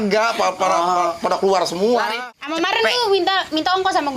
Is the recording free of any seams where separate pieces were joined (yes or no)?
no